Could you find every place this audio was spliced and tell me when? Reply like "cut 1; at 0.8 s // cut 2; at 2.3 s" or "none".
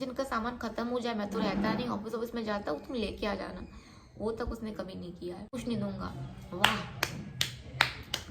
cut 1; at 5.5 s